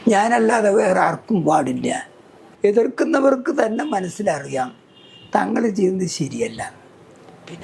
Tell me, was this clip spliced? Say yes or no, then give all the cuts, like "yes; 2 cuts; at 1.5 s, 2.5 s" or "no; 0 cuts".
yes; 1 cut; at 2.4 s